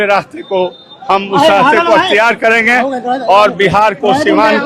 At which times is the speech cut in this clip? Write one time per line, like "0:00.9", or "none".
none